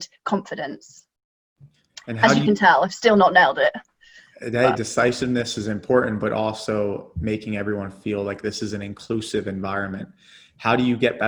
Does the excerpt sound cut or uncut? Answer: uncut